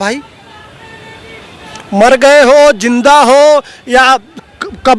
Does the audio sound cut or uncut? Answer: uncut